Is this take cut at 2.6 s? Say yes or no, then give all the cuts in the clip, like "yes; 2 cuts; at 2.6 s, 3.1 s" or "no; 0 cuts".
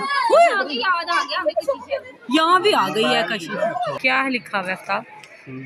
no; 1 cut; at 4.0 s